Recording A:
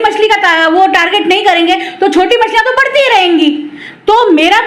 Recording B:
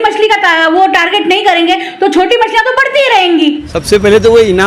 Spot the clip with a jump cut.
B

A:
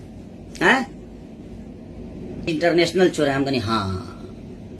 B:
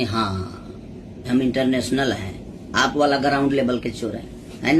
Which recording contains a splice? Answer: A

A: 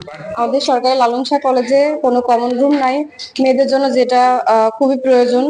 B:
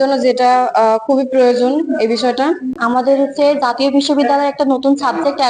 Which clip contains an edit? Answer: B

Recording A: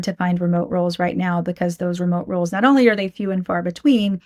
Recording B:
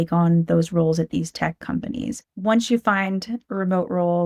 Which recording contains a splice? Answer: B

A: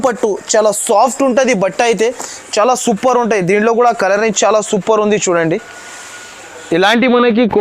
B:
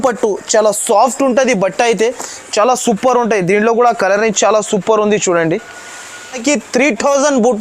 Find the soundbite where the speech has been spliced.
B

